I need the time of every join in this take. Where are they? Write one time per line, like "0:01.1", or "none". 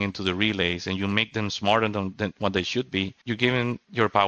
0:03.2